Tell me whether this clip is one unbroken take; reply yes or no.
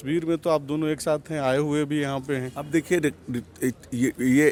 yes